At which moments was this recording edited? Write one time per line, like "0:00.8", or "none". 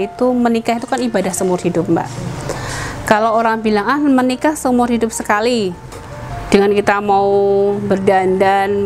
none